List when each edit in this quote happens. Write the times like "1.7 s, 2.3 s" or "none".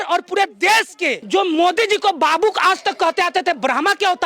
1.2 s